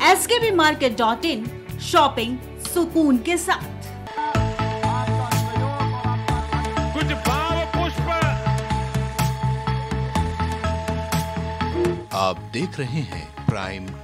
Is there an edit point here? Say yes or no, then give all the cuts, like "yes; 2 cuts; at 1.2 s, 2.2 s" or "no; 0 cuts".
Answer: yes; 1 cut; at 4.1 s